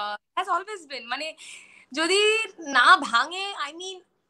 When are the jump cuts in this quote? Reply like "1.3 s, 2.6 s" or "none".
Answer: none